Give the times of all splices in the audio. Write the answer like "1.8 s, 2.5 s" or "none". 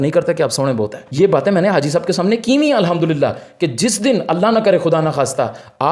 none